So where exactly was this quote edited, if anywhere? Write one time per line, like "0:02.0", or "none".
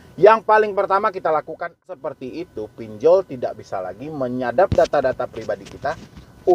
0:02.0